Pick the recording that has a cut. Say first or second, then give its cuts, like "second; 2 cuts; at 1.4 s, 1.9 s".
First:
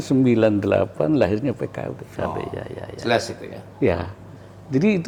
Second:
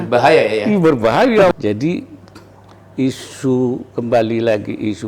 second; 1 cut; at 1.5 s